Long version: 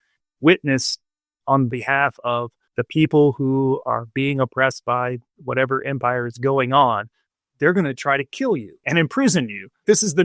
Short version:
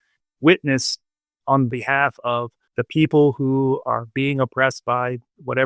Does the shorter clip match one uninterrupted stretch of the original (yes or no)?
yes